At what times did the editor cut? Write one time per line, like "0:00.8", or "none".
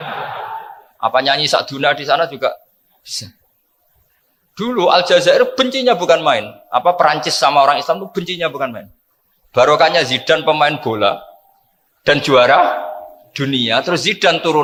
none